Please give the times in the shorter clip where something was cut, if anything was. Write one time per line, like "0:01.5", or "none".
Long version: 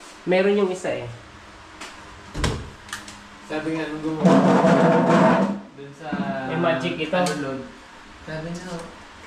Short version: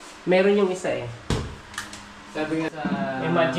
0:01.3
0:02.7